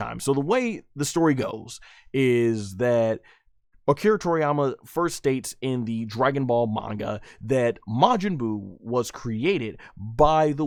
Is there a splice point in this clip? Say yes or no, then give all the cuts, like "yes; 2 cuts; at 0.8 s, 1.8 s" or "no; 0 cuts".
no; 0 cuts